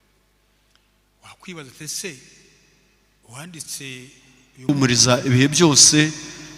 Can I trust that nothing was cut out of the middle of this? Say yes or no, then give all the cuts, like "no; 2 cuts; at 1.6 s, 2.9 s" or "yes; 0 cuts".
no; 1 cut; at 4.7 s